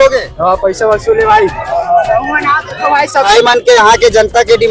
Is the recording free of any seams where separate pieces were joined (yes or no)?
no